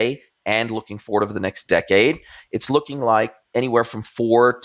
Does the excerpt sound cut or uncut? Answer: uncut